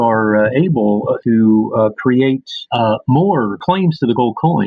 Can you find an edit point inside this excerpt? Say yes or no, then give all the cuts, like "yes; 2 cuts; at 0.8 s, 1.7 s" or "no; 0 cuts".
yes; 3 cuts; at 1.2 s, 2.6 s, 3.6 s